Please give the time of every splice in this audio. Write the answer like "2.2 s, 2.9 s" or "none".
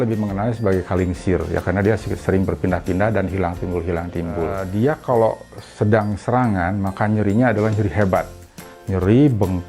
4.6 s